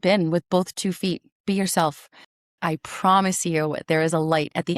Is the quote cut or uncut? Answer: cut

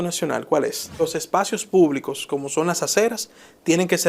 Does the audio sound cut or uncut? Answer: cut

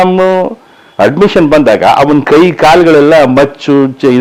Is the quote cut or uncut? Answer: uncut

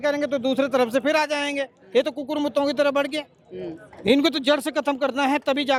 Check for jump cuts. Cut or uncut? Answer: uncut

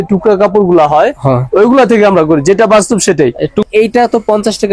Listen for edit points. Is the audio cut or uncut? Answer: cut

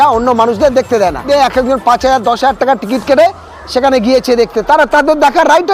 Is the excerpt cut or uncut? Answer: cut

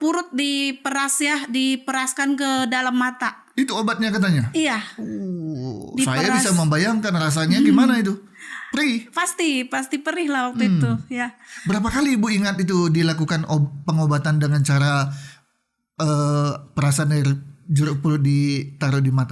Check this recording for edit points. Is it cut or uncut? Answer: uncut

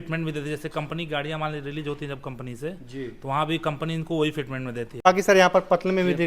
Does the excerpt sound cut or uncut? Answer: cut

